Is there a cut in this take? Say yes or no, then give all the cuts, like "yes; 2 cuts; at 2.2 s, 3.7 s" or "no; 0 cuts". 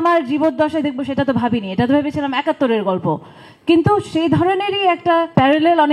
no; 0 cuts